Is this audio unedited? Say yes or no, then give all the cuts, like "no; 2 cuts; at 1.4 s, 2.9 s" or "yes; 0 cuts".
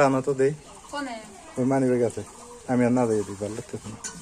yes; 0 cuts